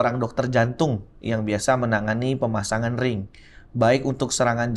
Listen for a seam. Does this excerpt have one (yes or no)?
no